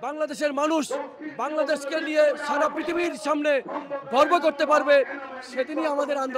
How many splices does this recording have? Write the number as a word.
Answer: zero